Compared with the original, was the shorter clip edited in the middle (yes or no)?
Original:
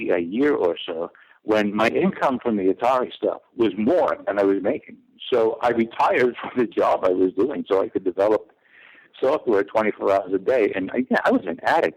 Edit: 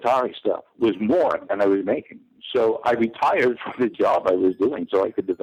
no